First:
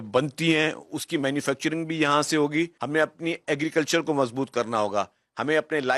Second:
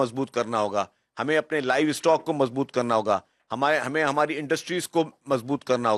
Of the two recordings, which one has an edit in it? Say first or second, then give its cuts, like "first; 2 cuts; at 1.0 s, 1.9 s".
first; 1 cut; at 2.8 s